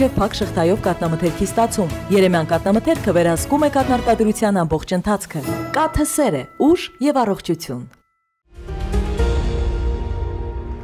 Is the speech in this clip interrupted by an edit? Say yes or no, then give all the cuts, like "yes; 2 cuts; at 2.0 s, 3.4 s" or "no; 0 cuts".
yes; 1 cut; at 8.6 s